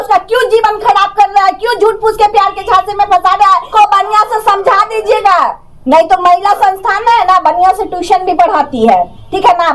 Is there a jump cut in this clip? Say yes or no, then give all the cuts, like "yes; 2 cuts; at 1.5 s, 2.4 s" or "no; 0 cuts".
yes; 1 cut; at 3.7 s